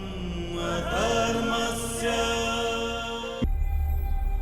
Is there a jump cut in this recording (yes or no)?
yes